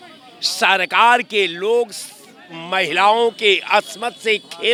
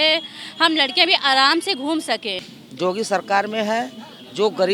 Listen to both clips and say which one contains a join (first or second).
second